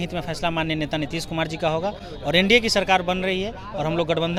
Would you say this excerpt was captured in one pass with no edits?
yes; 0 cuts

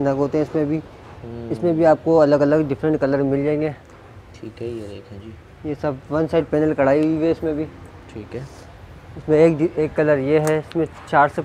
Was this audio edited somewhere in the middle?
no; 0 cuts

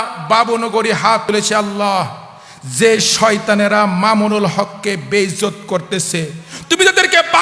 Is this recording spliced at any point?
yes; 1 cut; at 1.2 s

